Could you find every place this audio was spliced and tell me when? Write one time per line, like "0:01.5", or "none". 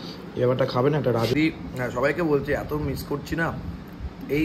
0:01.3